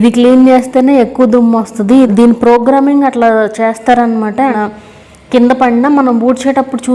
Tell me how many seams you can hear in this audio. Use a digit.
2